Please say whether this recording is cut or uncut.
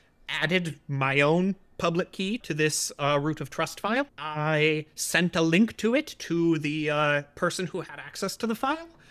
cut